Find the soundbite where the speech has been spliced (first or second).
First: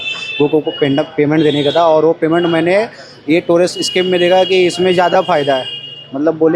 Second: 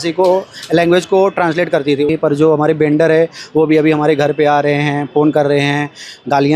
second